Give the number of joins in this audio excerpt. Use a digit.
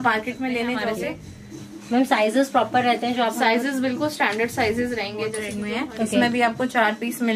2